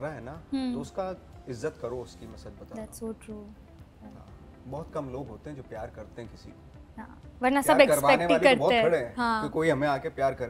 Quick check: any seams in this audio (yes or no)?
no